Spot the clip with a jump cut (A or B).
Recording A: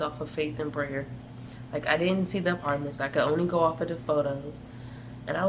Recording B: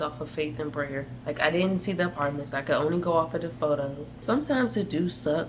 B